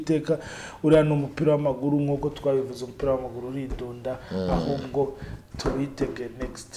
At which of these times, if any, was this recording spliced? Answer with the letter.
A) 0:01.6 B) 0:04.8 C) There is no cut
C